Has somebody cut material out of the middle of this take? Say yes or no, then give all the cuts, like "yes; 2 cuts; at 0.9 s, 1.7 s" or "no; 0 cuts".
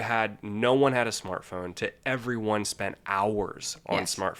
no; 0 cuts